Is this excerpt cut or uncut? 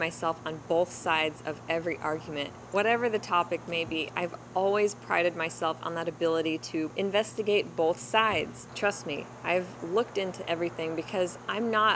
cut